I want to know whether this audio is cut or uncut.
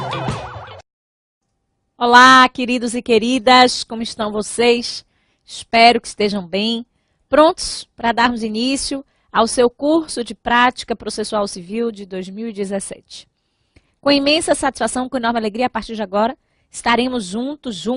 uncut